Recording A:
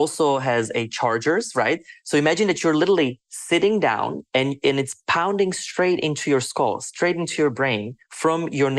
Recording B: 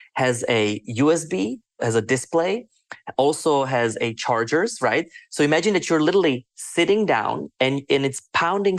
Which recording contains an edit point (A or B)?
B